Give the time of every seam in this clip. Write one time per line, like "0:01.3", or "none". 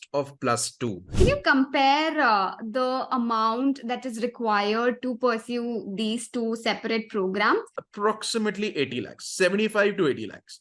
0:01.1
0:07.8